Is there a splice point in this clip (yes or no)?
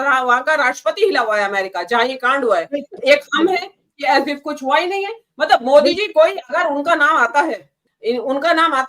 yes